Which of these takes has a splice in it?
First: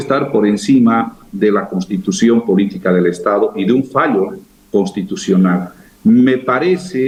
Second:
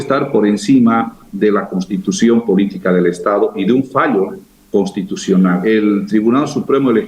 second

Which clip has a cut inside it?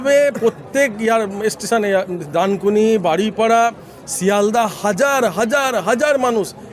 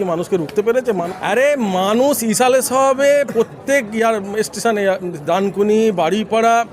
second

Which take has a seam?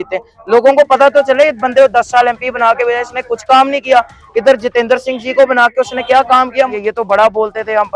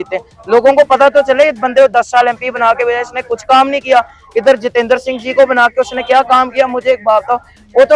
first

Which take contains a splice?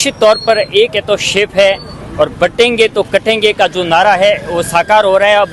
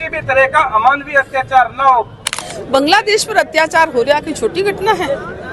second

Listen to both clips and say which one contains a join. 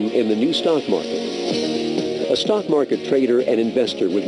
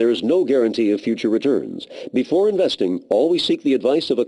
first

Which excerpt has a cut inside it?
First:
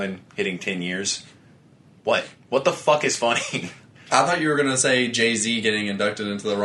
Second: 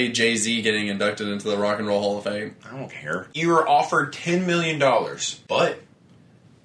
second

